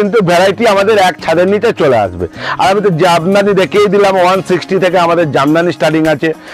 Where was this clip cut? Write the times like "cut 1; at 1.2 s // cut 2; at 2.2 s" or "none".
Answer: none

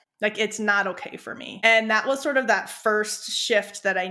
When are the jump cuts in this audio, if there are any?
cut 1; at 1.5 s

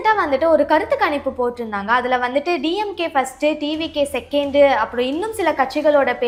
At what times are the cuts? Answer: none

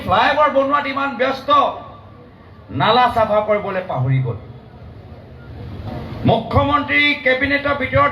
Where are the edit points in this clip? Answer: cut 1; at 5.9 s

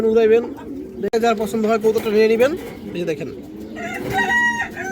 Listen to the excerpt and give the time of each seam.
cut 1; at 1.2 s

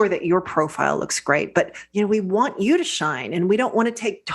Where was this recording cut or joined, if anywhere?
cut 1; at 1.8 s

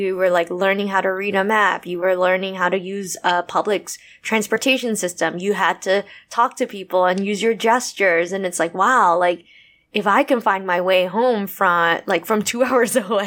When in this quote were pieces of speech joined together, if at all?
none

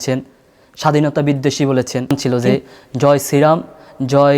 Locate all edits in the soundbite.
cut 1; at 2.1 s

